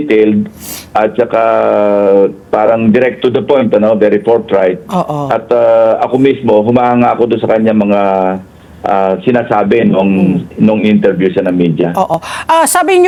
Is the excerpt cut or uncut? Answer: uncut